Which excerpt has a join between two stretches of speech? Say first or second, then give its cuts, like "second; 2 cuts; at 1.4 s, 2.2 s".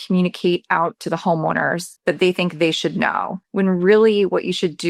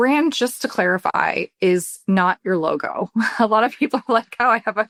first; 2 cuts; at 1.9 s, 3.4 s